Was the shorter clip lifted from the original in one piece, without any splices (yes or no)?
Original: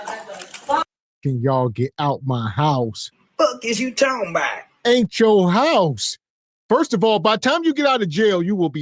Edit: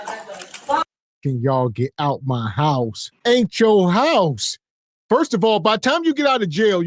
no